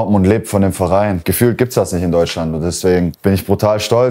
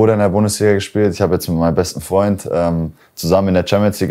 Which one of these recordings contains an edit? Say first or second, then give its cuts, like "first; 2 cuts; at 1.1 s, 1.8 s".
first; 2 cuts; at 1.2 s, 3.2 s